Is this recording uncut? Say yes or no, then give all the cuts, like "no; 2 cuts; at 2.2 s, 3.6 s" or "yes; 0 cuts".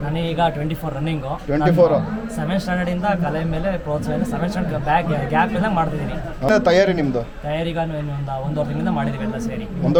yes; 0 cuts